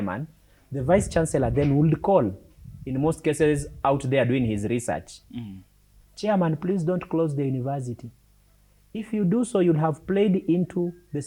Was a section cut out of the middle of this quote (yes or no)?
no